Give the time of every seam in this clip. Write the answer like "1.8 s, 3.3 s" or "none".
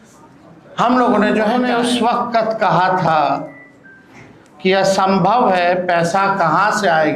1.6 s